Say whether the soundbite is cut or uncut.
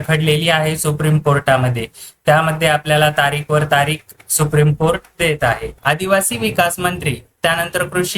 cut